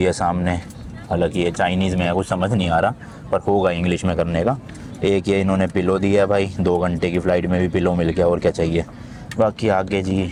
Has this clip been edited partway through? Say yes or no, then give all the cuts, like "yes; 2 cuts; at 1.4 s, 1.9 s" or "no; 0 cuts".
no; 0 cuts